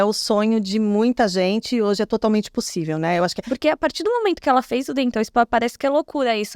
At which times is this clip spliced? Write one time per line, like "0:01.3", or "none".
0:03.4